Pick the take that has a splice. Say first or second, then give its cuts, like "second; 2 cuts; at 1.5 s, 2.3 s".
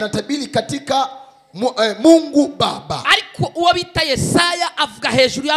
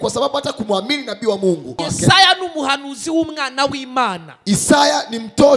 second; 1 cut; at 1.8 s